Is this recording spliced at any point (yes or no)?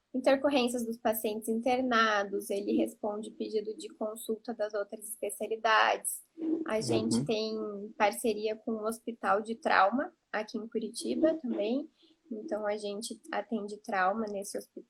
no